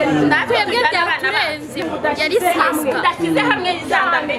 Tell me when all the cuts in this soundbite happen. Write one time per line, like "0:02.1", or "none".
0:01.9

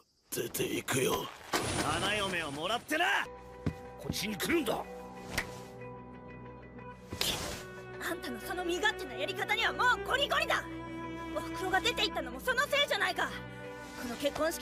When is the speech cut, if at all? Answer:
0:11.0

